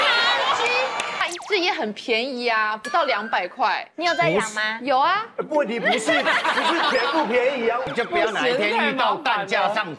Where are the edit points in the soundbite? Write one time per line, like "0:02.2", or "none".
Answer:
0:01.2
0:07.9